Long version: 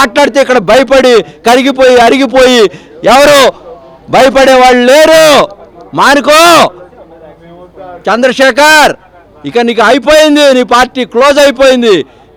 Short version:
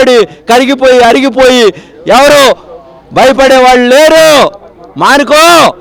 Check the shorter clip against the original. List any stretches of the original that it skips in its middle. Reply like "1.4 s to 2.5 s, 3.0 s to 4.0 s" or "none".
none